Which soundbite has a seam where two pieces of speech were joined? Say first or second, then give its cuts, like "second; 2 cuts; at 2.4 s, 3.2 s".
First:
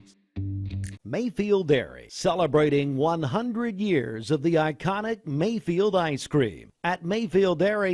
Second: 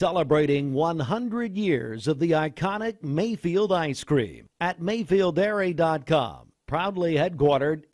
first; 1 cut; at 0.9 s